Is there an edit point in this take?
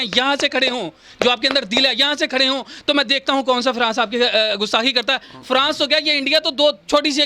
no; 0 cuts

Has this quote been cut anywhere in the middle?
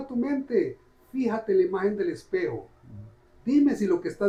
no; 0 cuts

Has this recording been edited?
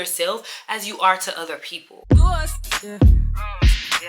yes; 1 cut; at 1.9 s

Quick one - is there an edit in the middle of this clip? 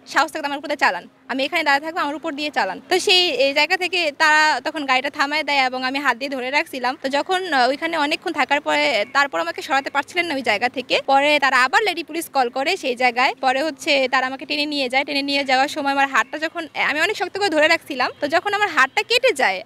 no; 0 cuts

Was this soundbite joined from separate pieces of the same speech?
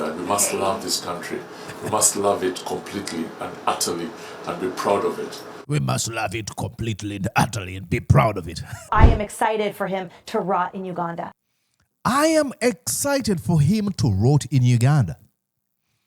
yes; 1 cut; at 8.9 s

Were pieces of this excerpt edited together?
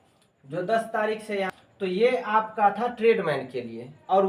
yes; 1 cut; at 1.5 s

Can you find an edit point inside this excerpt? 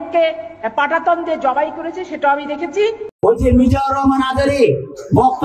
yes; 1 cut; at 3.1 s

